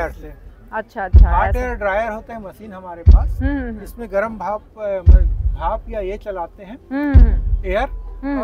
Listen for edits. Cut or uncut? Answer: uncut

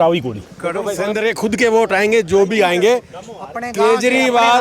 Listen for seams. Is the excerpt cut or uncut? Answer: cut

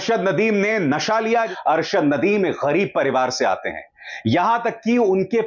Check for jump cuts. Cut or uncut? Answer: cut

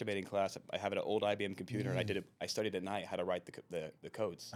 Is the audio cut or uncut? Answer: uncut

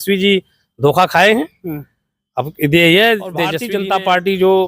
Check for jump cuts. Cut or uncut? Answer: cut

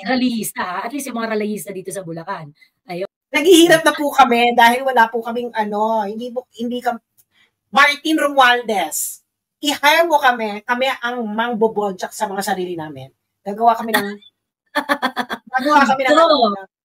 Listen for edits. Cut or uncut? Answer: cut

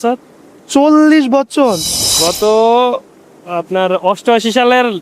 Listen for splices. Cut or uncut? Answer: cut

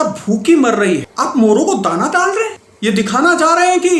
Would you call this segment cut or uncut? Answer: cut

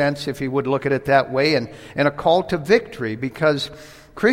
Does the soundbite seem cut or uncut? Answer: uncut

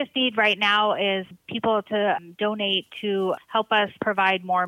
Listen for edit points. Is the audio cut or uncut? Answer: uncut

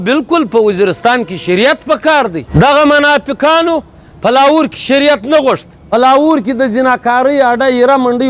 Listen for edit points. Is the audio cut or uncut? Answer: cut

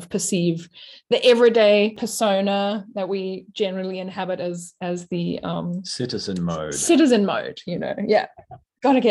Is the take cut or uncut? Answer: cut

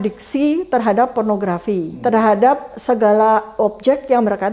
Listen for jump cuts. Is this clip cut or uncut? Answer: cut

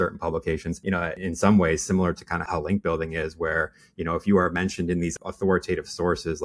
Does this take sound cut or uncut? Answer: cut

